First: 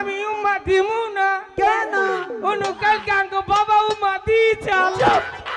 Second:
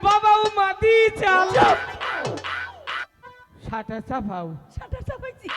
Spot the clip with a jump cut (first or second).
second